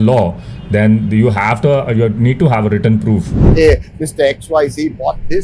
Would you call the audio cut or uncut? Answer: cut